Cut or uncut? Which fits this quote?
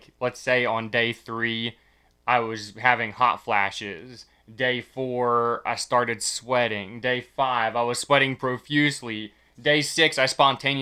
uncut